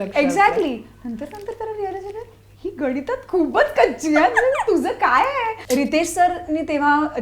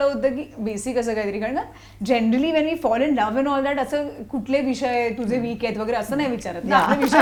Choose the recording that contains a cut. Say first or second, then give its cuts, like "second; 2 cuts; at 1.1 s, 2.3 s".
first; 1 cut; at 5.6 s